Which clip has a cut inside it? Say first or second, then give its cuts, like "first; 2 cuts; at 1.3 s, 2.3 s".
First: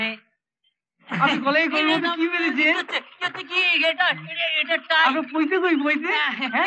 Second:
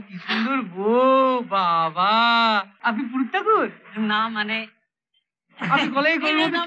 second; 1 cut; at 2.7 s